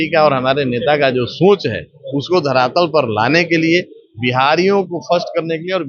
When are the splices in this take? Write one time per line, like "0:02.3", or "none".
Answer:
none